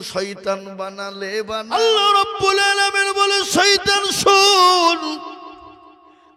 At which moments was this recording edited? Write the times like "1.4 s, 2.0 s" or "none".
1.4 s